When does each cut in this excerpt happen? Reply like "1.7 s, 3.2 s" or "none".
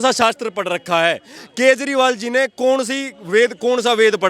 none